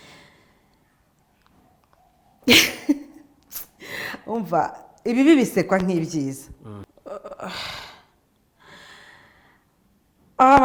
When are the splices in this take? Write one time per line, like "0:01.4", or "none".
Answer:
0:06.9